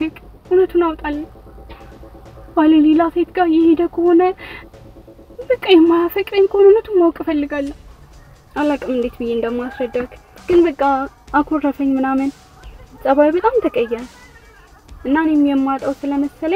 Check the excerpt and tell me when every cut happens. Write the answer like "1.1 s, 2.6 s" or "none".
7.8 s